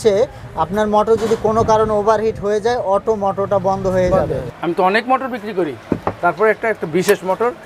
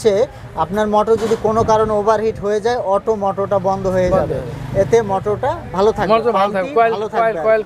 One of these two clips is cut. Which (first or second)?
first